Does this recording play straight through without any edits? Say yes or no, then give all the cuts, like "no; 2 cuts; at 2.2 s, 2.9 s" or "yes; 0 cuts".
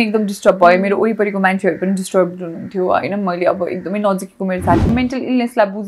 no; 1 cut; at 4.9 s